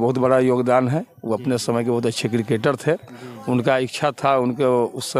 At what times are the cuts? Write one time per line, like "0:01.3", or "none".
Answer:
none